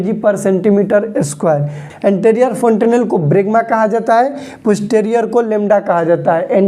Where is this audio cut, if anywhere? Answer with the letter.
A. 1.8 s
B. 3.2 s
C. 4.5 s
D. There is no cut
A